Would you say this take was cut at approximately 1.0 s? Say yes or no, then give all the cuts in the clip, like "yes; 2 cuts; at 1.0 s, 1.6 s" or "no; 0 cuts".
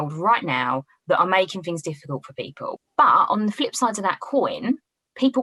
no; 1 cut; at 2.8 s